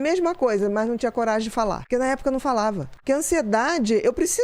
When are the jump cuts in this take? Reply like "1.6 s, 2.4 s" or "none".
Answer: 1.8 s, 2.9 s